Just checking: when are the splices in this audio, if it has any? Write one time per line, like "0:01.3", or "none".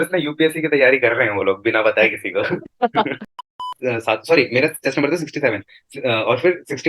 0:03.7